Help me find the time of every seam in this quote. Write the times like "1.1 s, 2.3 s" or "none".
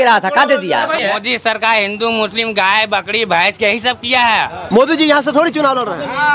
1.0 s, 4.6 s